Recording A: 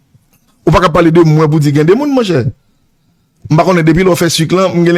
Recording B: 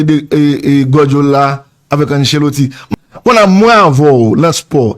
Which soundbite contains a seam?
B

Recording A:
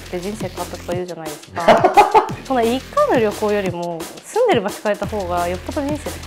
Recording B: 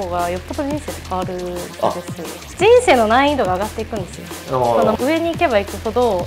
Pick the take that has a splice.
B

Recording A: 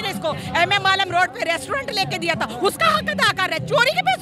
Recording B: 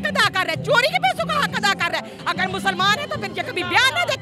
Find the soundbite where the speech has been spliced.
B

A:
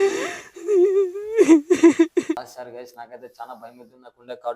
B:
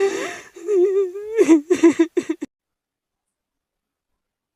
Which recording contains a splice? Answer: A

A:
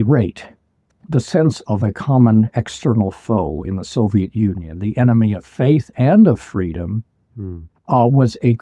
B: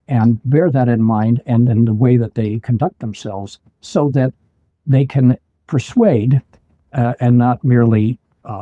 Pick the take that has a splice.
A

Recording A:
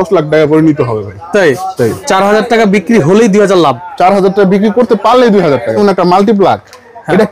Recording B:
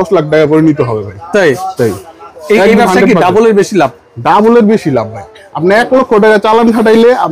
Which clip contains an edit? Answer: A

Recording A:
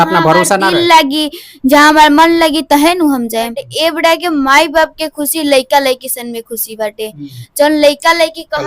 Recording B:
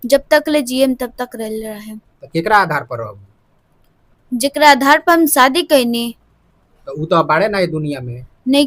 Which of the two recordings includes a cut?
A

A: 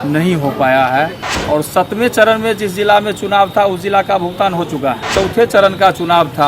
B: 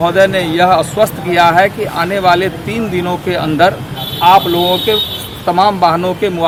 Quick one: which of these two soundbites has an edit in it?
A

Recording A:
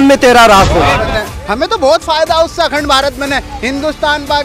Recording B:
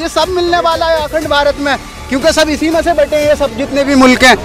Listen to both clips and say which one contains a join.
A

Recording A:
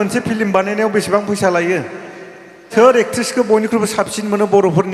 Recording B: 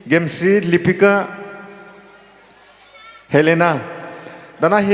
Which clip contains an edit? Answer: A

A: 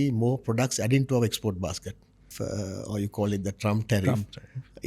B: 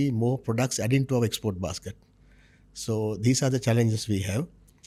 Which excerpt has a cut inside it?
A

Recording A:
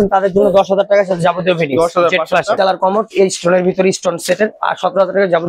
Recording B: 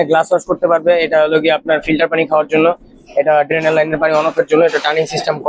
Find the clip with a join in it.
A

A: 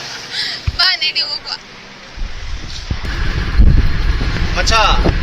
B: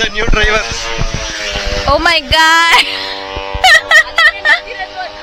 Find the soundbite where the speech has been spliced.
A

